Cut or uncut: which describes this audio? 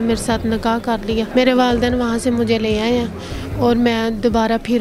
cut